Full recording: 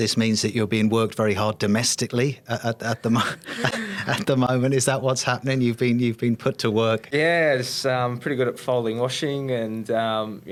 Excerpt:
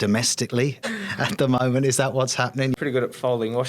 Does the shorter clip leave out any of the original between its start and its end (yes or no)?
yes